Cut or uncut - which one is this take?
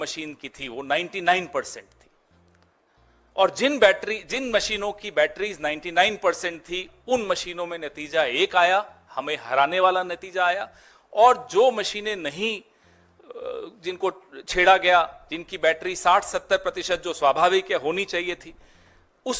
uncut